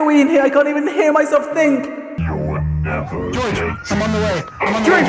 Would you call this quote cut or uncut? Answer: cut